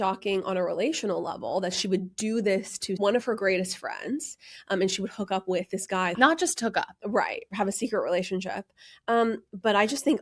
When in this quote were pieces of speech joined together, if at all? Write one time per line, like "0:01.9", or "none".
0:03.0
0:06.1